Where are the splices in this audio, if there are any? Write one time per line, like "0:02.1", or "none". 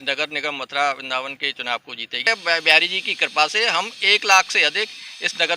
0:02.3